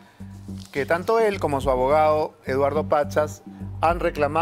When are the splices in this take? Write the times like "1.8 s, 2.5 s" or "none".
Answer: none